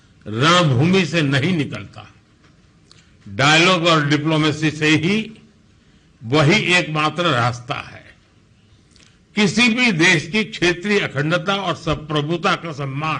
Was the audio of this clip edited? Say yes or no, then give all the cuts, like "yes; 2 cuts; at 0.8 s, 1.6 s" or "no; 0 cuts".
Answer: no; 0 cuts